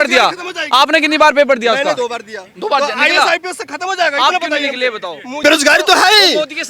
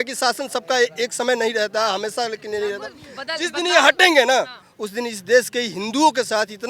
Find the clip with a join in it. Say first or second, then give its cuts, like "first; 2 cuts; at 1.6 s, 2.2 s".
first; 1 cut; at 5.4 s